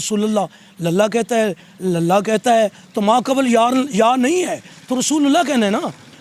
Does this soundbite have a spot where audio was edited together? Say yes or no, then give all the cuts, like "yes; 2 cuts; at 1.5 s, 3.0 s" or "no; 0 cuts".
no; 0 cuts